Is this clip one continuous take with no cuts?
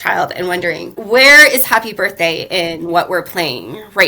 no; 1 cut; at 1.0 s

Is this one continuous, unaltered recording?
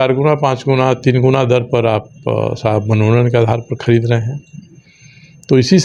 yes; 0 cuts

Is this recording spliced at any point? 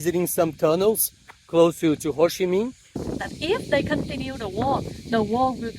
yes; 1 cut; at 3.0 s

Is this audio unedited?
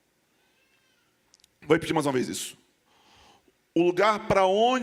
yes; 0 cuts

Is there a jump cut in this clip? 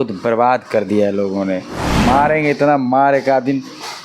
yes; 1 cut; at 1.9 s

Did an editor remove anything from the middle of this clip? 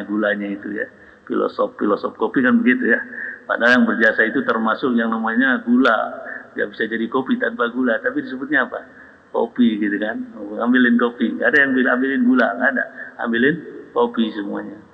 no; 0 cuts

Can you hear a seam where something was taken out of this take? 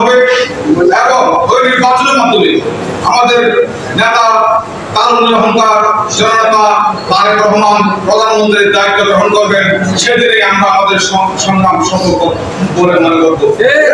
no; 0 cuts

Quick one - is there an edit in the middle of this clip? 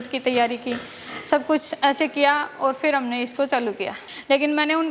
yes; 1 cut; at 4.0 s

